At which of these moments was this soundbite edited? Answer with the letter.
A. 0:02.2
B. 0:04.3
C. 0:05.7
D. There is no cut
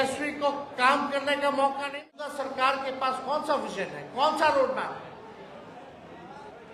A